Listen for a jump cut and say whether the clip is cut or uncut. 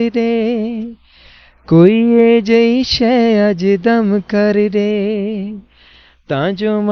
uncut